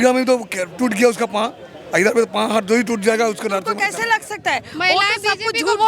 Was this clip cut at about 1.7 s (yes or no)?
no